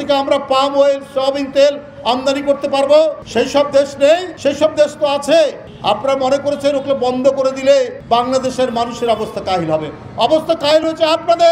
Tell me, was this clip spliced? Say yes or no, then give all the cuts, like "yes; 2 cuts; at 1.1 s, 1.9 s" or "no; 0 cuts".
yes; 3 cuts; at 3.2 s, 4.3 s, 8.0 s